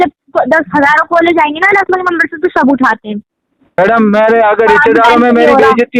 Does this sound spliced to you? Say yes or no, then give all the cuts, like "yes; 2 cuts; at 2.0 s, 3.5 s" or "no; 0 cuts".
yes; 1 cut; at 3.8 s